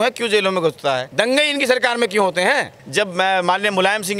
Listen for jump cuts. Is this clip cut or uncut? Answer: cut